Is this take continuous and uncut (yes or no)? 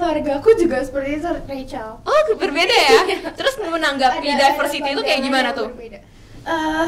yes